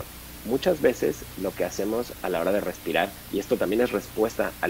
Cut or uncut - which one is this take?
uncut